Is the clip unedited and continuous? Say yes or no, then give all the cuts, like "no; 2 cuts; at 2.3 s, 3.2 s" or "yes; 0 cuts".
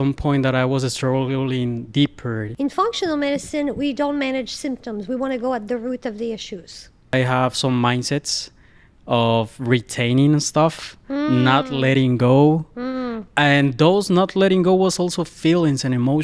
no; 2 cuts; at 2.5 s, 7.1 s